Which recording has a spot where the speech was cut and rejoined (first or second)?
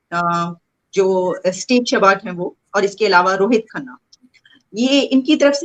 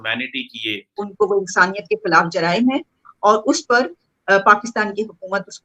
second